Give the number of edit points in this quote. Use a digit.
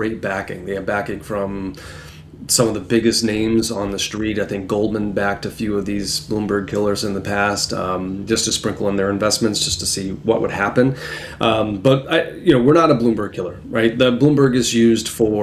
0